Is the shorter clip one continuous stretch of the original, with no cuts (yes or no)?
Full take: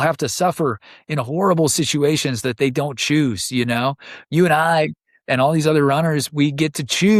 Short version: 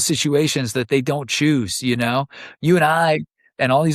yes